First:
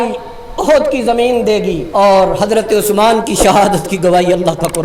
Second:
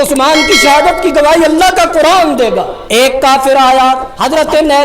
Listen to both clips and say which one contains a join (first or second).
second